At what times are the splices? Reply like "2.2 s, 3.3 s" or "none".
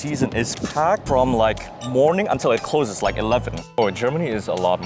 3.8 s

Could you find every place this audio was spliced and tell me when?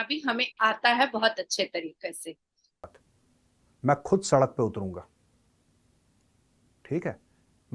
2.9 s

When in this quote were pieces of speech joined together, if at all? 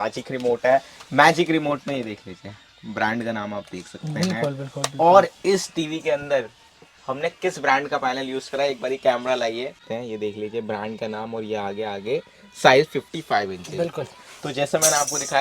9.8 s

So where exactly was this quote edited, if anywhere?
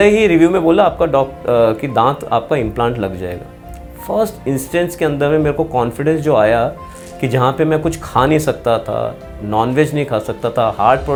none

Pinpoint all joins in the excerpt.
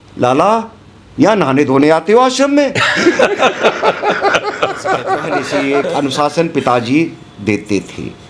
5.5 s

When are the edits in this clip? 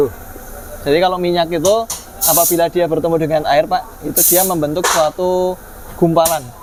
none

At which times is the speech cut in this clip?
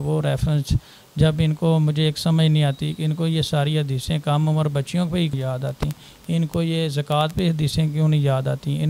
5.3 s

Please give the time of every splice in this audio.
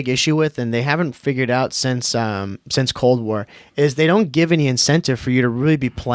none

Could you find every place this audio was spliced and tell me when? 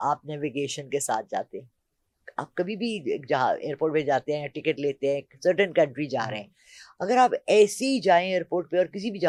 none

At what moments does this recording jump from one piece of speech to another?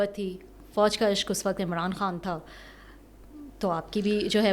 none

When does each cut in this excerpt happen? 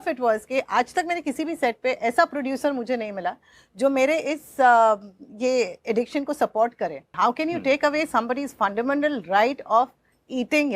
7.1 s

